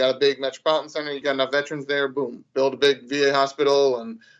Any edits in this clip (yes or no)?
yes